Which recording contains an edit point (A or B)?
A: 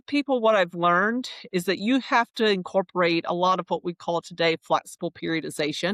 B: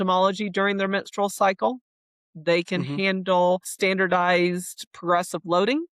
B